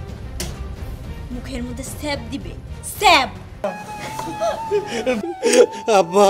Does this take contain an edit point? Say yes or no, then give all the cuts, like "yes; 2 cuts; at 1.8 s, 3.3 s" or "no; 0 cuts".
yes; 1 cut; at 3.6 s